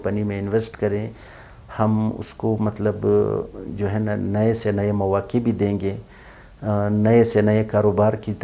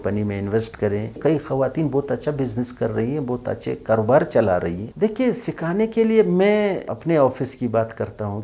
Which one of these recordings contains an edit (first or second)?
second